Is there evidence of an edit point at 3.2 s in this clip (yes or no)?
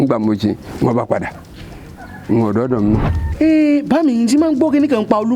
yes